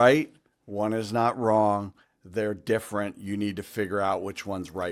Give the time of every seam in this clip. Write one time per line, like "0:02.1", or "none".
none